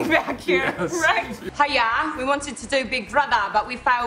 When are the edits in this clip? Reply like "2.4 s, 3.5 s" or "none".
1.4 s